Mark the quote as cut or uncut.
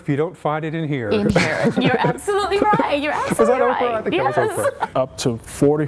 cut